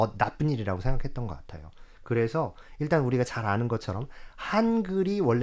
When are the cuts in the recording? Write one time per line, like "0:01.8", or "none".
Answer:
none

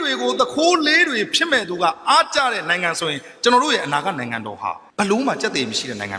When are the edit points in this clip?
0:04.8

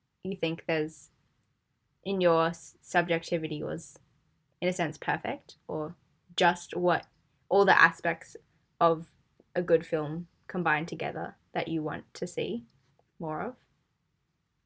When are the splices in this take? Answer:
none

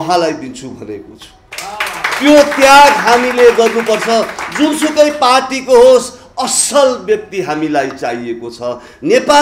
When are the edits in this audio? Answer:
none

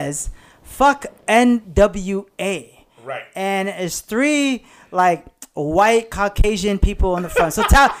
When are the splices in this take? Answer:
none

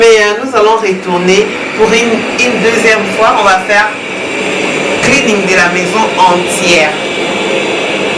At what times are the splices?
none

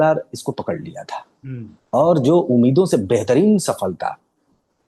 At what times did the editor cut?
none

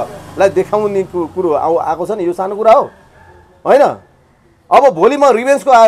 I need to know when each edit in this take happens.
none

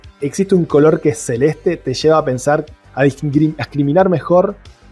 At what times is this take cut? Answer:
none

